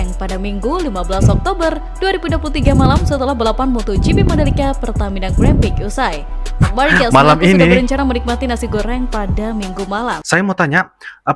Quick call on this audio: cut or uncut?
cut